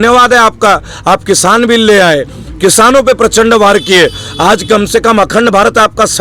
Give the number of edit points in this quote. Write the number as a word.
zero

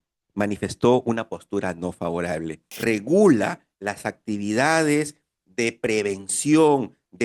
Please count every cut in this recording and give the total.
one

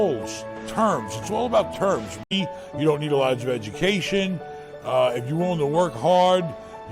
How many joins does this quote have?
one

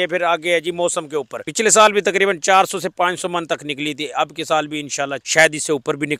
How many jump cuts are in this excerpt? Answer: two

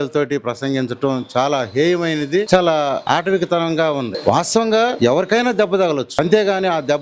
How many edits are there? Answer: five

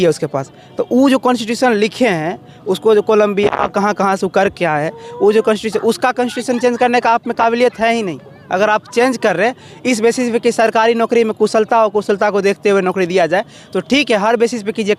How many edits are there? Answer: zero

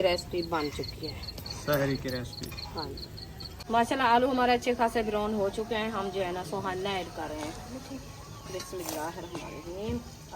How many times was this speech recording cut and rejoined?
one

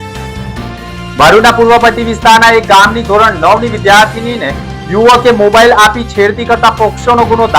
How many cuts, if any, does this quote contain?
one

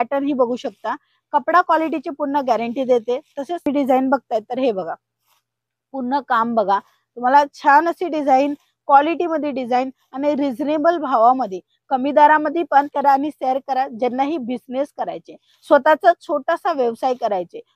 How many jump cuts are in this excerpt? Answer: two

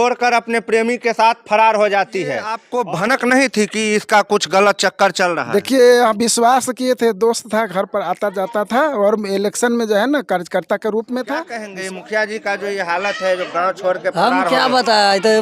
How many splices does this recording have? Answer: two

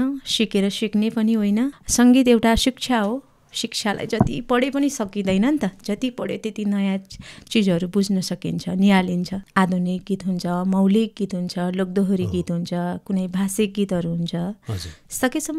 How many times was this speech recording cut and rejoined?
two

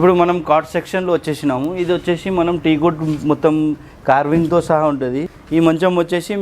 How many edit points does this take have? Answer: one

